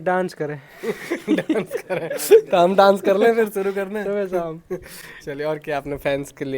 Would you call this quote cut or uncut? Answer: uncut